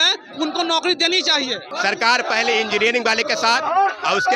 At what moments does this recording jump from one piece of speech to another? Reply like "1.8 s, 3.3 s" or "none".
1.8 s